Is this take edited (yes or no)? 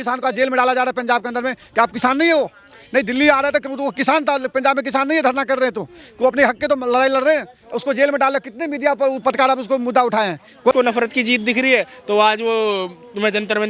yes